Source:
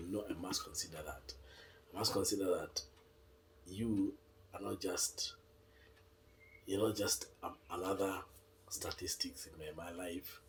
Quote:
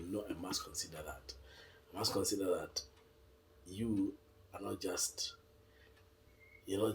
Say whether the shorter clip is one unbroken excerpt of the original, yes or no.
yes